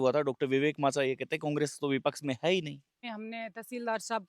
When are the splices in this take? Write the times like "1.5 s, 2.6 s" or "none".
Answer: 3.1 s